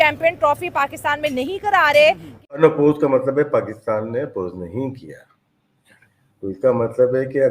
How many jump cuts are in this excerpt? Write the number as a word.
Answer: one